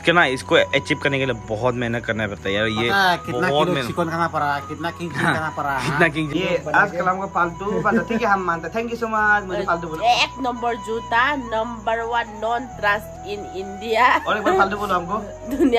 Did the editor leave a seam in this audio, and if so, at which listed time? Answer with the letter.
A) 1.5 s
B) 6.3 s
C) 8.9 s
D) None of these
B